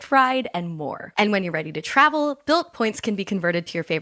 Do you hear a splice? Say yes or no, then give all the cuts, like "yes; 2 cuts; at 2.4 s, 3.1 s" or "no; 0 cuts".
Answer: yes; 1 cut; at 1.0 s